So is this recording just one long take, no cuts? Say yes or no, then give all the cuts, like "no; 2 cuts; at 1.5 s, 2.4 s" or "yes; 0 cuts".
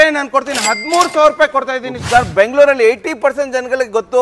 no; 1 cut; at 1.9 s